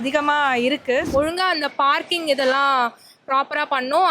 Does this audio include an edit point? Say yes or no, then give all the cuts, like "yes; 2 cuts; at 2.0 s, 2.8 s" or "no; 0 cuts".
yes; 1 cut; at 1.1 s